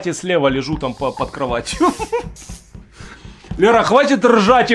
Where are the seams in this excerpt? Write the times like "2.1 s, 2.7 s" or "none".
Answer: none